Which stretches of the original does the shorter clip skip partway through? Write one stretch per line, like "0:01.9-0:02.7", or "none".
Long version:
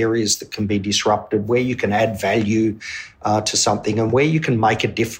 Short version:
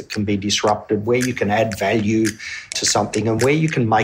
0:03.2-0:03.5

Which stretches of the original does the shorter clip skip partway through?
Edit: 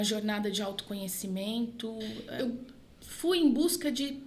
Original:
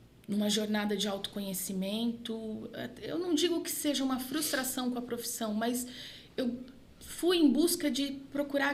0:02.7-0:06.2

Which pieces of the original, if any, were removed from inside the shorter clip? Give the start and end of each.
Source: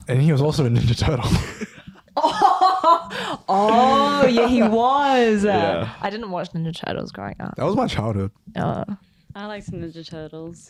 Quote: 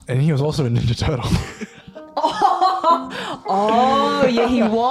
none

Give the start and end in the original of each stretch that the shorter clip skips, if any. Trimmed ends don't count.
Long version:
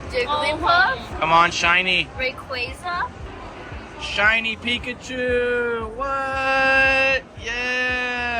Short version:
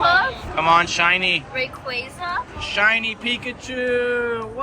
0:03.2-0:03.9

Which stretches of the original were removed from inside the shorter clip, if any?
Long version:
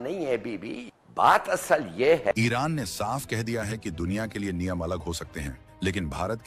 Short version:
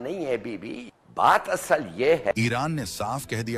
none

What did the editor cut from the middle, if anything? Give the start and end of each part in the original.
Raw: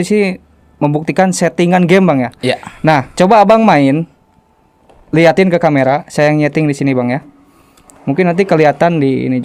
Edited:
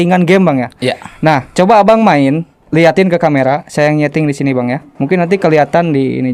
0:04.2-0:04.9
0:07.3-0:07.9

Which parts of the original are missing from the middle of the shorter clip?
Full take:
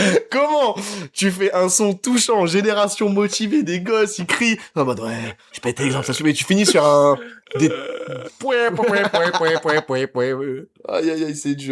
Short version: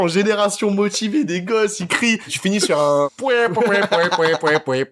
0:04.7-0:06.4
0:07.2-0:08.4

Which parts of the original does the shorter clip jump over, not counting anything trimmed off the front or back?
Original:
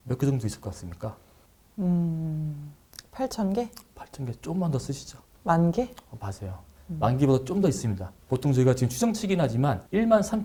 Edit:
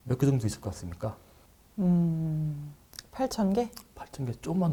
none

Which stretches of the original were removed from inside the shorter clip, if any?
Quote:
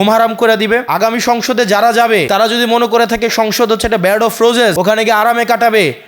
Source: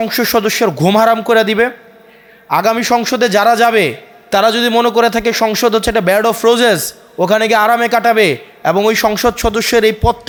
0:01.7-0:02.5
0:03.9-0:04.3
0:06.8-0:07.2

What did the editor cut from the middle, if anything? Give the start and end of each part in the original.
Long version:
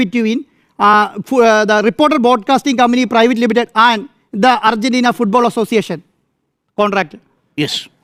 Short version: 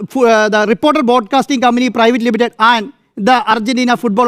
none

